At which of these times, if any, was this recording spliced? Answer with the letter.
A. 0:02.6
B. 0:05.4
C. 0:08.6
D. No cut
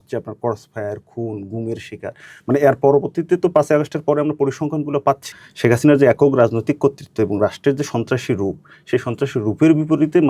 B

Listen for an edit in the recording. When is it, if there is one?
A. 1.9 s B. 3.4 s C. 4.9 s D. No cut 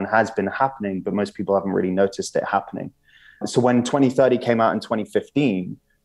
B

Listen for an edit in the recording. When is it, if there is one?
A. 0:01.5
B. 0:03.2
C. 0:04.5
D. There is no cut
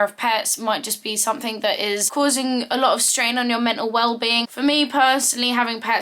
C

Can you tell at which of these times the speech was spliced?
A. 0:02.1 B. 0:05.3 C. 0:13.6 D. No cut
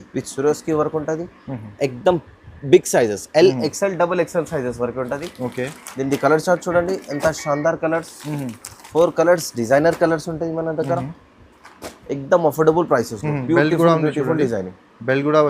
D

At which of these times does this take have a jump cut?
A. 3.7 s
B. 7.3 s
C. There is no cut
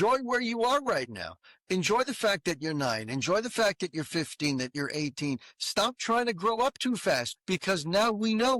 B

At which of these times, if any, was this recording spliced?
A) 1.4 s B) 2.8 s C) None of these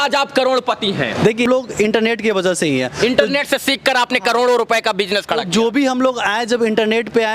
A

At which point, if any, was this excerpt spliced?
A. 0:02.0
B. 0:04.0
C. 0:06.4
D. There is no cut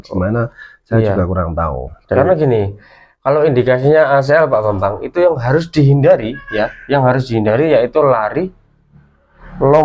A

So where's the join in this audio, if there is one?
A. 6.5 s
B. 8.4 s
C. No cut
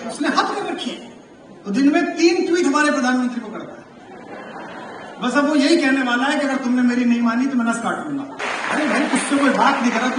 B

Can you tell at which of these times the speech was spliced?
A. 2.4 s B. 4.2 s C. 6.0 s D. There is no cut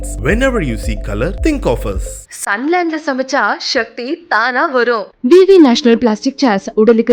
D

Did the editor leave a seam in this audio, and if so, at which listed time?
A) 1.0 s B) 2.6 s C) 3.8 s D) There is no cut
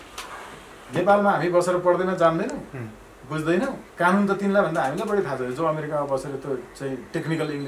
C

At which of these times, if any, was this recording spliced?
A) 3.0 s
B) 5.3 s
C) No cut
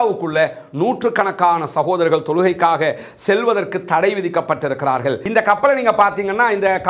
B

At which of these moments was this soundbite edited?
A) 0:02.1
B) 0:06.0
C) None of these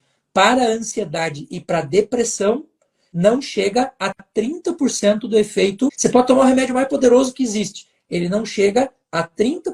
B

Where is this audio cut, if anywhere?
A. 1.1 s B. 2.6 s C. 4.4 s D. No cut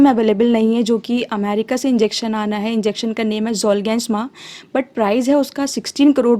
D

